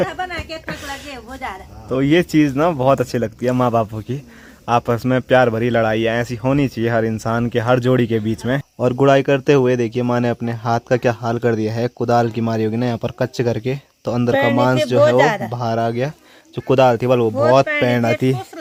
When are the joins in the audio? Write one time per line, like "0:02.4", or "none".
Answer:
none